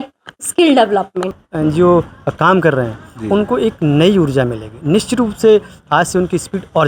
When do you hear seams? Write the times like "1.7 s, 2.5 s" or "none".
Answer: 1.3 s